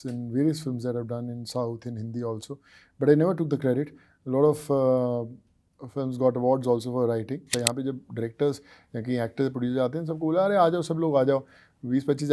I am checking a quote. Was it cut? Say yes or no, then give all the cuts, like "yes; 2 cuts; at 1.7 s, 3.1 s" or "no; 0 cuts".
yes; 1 cut; at 7.6 s